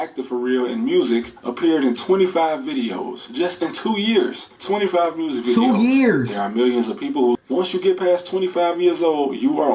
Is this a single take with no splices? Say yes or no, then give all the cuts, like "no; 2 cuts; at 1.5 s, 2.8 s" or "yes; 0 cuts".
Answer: no; 1 cut; at 7.4 s